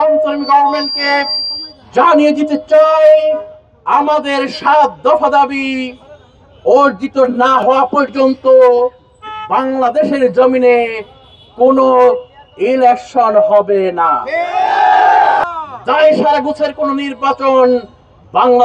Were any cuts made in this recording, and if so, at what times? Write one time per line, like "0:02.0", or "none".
0:15.4